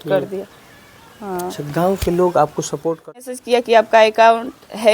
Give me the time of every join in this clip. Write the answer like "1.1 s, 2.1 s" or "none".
3.1 s